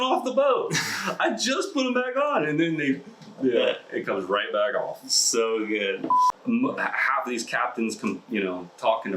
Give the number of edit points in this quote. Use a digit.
1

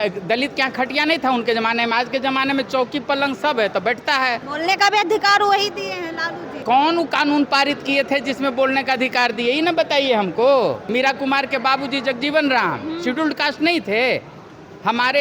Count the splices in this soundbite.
3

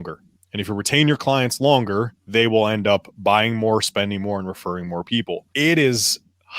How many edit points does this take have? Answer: 2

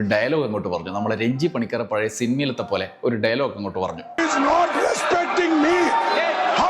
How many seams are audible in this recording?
1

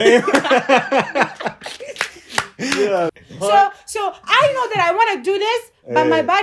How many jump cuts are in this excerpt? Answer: 1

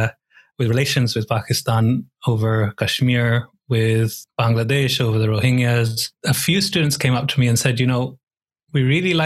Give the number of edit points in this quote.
2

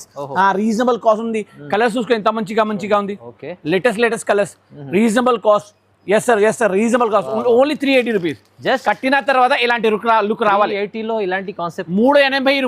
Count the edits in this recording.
0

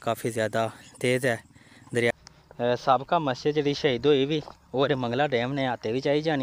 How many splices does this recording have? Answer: 1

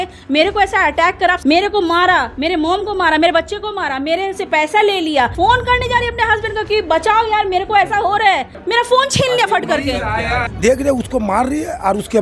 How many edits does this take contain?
4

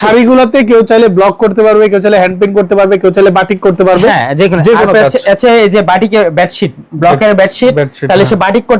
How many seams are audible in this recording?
0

